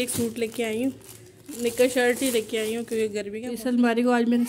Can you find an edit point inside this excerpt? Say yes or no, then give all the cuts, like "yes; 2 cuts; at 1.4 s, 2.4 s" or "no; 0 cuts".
yes; 1 cut; at 3.5 s